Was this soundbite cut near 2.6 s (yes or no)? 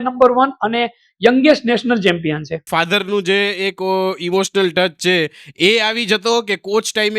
yes